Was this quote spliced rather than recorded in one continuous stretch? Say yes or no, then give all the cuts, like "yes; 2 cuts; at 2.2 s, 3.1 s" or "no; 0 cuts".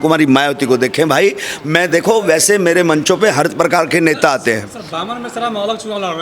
no; 0 cuts